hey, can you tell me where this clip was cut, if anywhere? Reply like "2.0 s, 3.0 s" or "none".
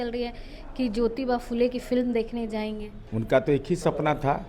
2.9 s